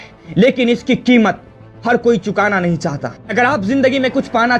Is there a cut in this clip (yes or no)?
yes